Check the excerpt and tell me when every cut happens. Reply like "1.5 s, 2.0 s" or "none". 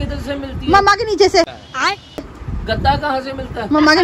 none